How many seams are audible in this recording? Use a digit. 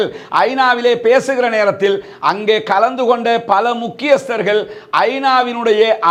0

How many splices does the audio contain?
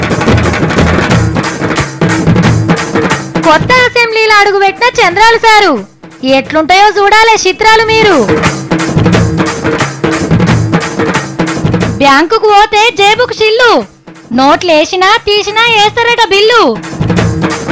0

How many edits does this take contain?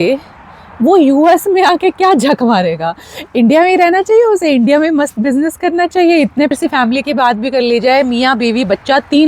1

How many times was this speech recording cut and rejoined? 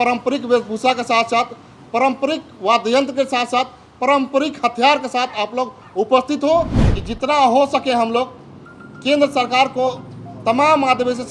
1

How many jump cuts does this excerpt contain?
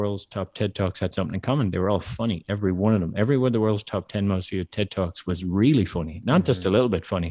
0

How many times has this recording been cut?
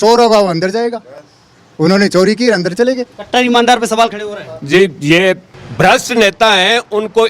0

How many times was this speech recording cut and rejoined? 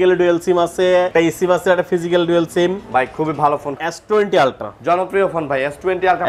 2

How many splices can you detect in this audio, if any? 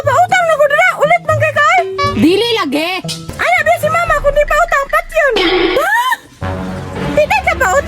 1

